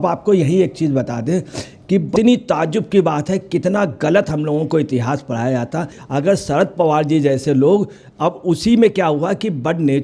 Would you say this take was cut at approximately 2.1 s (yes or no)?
yes